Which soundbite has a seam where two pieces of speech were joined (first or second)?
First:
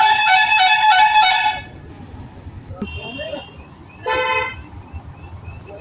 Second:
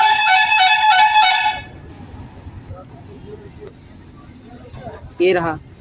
first